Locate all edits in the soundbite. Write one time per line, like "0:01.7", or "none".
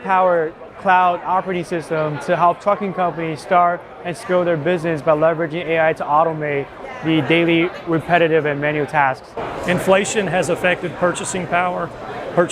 0:09.3

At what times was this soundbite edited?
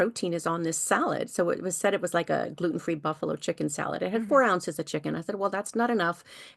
none

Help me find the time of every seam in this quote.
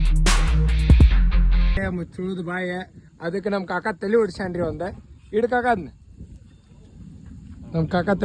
0:01.8

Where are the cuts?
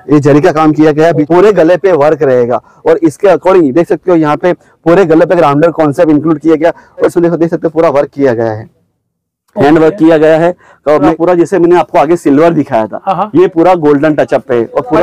0:01.2
0:07.1
0:11.1

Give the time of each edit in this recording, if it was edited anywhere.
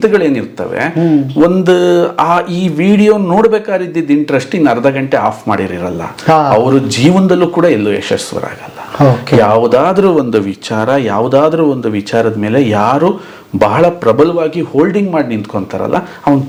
none

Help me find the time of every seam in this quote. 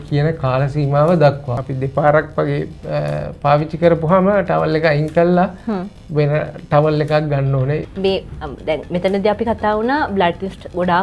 0:01.5
0:07.9

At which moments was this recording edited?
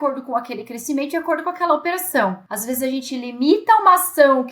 0:02.5

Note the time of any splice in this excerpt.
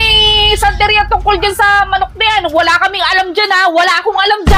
none

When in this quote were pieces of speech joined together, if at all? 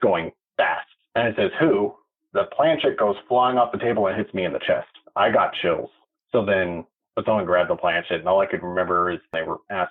0:05.0
0:06.1
0:07.0

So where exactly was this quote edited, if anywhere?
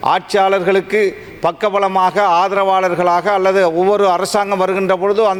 none

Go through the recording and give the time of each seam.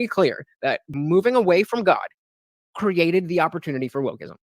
0:00.9

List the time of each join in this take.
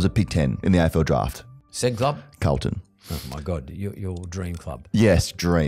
0:01.6

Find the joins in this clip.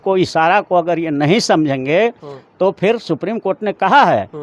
none

